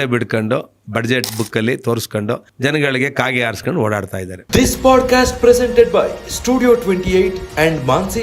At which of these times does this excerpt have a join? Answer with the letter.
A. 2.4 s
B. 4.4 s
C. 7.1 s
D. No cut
B